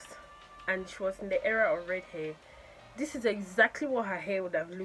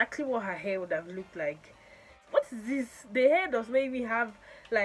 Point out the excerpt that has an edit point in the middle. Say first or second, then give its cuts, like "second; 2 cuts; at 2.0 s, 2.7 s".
second; 1 cut; at 2.2 s